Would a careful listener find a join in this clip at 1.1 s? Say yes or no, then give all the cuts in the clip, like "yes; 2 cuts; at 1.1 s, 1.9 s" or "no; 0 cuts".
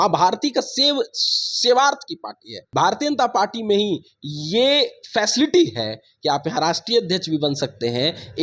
no; 1 cut; at 2.6 s